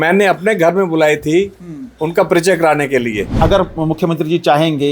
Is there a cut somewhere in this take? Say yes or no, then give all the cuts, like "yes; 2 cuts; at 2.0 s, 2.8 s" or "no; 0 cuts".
yes; 1 cut; at 3.3 s